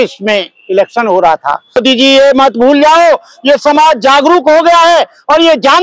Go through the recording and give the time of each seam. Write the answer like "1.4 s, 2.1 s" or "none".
1.8 s